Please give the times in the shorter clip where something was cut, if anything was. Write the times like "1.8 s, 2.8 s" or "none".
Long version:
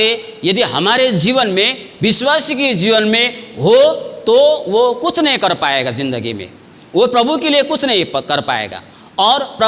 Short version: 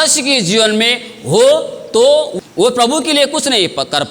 2.3 s